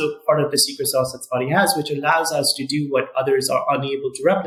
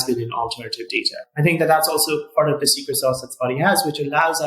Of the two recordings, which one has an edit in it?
second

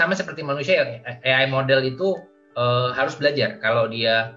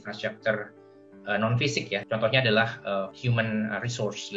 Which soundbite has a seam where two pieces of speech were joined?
second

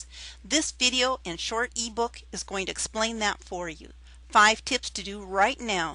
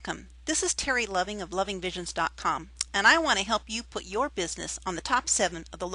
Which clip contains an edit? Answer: first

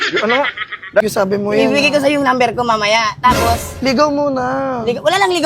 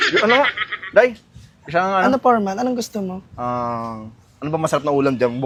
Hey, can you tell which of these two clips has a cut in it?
first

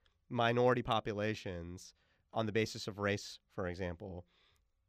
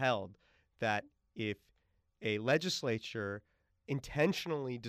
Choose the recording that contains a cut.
first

